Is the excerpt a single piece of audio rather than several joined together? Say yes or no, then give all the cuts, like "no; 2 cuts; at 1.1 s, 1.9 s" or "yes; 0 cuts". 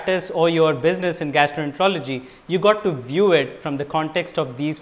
yes; 0 cuts